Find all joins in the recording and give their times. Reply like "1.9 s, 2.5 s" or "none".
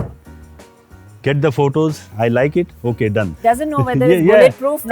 2.0 s, 3.2 s